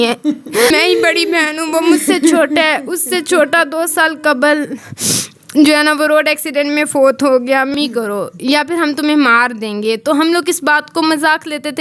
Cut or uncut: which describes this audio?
cut